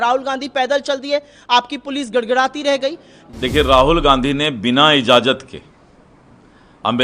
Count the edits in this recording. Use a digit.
1